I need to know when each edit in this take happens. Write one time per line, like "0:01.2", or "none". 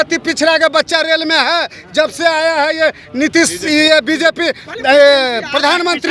none